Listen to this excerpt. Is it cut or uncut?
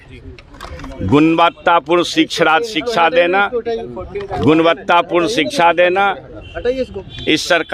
uncut